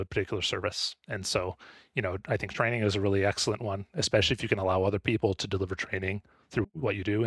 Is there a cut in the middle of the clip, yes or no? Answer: no